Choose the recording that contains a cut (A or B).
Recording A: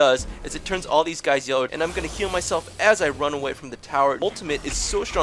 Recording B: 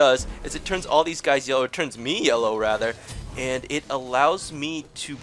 A